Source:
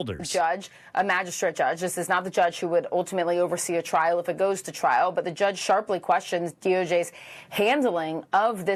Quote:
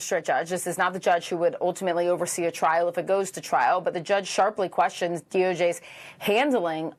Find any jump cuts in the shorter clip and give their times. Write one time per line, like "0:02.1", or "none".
none